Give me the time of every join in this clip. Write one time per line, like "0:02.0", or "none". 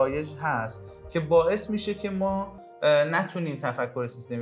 none